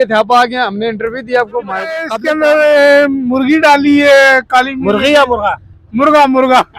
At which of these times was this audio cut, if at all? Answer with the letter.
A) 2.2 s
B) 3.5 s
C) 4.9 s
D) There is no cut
A